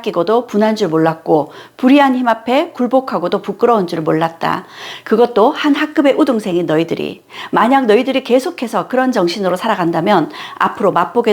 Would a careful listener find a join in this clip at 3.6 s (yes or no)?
no